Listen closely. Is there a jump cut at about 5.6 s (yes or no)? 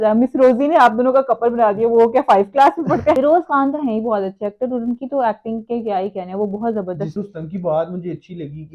no